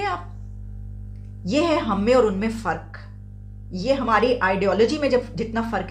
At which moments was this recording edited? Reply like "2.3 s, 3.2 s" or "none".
none